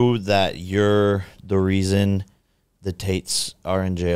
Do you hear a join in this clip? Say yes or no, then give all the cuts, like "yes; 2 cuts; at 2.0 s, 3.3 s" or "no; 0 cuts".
no; 0 cuts